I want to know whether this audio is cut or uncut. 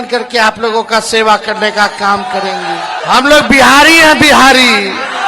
cut